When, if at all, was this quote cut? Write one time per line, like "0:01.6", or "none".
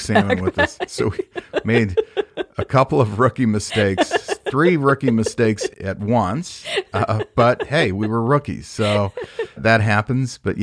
0:05.7
0:09.6